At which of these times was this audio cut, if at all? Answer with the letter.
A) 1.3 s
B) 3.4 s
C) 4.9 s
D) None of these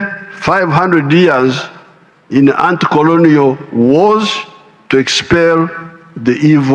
D